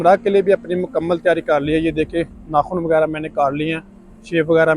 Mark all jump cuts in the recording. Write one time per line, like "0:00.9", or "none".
none